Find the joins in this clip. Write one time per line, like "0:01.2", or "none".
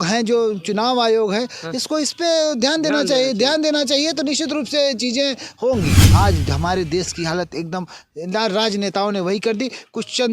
0:06.0